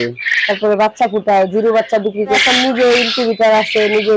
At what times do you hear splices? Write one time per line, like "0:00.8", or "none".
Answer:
0:02.4